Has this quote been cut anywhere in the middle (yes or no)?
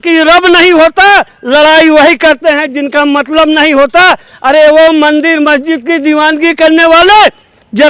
no